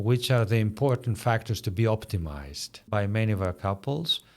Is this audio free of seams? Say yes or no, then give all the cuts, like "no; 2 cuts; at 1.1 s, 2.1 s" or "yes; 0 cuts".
no; 1 cut; at 2.8 s